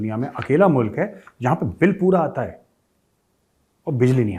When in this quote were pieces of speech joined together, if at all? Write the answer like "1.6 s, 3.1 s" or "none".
none